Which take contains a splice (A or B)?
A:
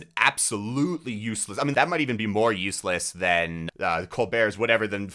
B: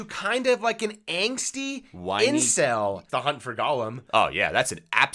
B